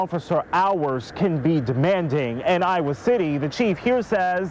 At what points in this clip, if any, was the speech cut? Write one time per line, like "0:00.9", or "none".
none